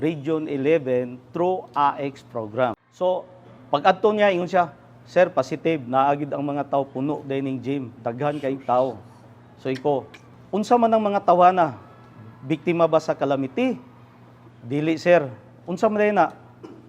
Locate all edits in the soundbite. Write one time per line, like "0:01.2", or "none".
0:02.9